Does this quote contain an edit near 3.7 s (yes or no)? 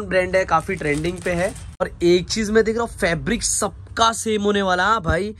no